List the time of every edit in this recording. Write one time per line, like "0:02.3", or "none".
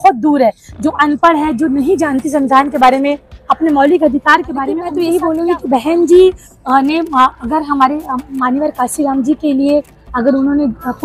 0:04.8